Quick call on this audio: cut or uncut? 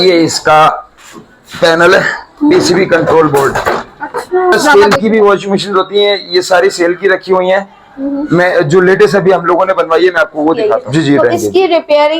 cut